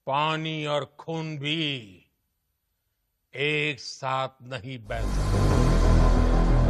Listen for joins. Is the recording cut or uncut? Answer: cut